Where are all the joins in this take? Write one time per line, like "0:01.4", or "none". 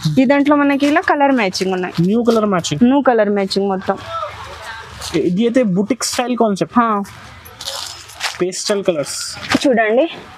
none